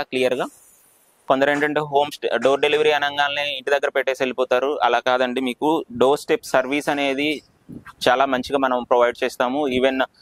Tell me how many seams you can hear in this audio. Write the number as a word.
one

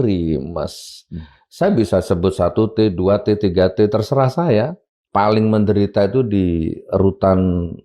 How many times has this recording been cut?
one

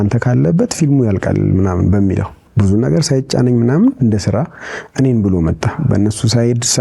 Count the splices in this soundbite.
one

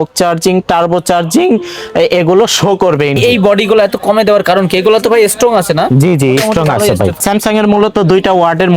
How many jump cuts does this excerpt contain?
two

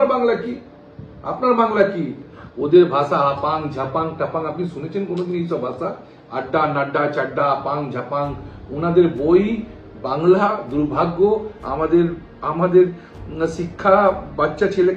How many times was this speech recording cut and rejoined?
one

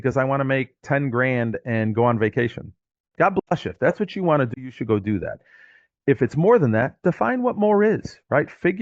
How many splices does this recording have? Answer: zero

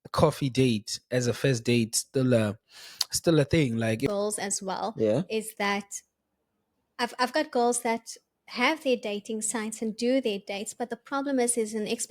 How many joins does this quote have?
one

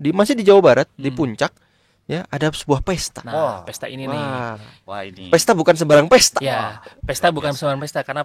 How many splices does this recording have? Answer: zero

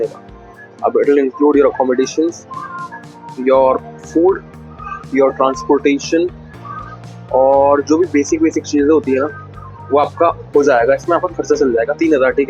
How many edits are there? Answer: zero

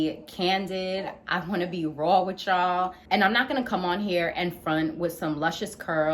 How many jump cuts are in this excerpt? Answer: one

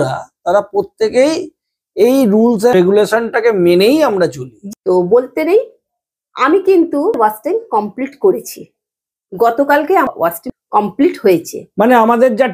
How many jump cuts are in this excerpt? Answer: four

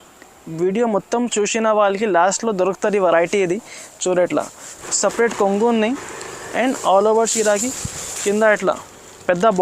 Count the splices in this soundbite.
one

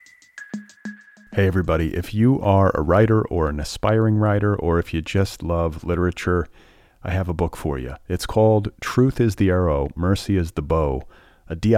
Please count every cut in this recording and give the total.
one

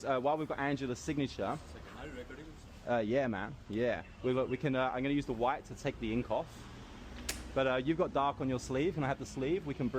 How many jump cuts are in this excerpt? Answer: one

